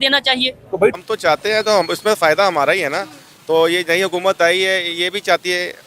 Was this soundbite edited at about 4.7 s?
no; 1 cut; at 0.9 s

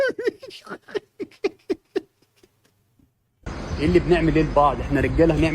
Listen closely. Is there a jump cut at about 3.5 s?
yes; 1 cut; at 3.5 s

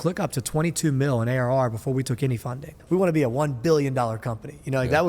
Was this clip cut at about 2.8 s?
yes; 1 cut; at 2.8 s

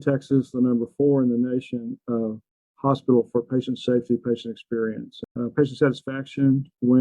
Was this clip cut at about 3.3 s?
no; 1 cut; at 5.2 s

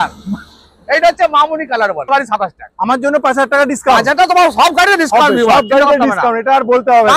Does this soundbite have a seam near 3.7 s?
no; 1 cut; at 2.1 s

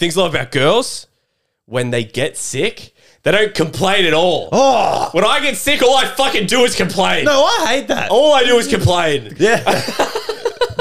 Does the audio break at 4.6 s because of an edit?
no; 1 cut; at 9.3 s

